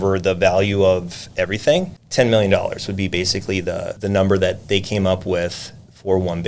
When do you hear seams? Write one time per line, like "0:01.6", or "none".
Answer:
0:02.0
0:03.9